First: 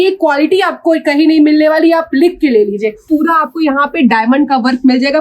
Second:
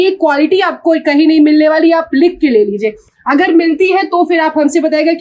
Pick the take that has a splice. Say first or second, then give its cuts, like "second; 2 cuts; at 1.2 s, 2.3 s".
first; 1 cut; at 3.0 s